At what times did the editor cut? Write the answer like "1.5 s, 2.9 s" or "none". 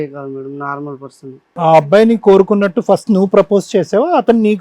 1.5 s